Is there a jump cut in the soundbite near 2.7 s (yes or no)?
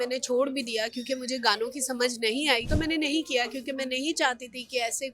yes